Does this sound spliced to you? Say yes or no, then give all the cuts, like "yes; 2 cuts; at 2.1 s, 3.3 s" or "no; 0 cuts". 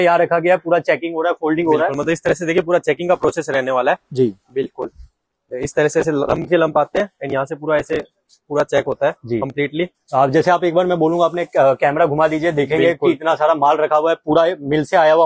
no; 0 cuts